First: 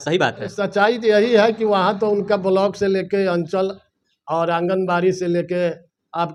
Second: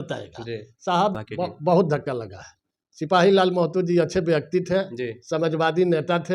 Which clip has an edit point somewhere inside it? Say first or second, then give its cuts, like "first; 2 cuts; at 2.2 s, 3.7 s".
second; 1 cut; at 1.2 s